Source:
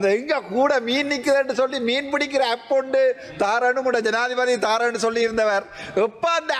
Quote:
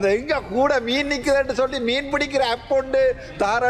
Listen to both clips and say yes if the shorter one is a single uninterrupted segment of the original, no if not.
yes